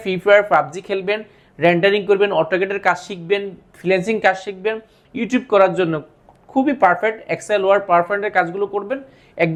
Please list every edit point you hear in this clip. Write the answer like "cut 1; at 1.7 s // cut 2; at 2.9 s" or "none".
none